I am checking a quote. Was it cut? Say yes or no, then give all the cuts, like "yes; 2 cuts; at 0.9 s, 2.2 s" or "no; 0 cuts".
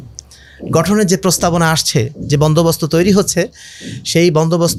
no; 0 cuts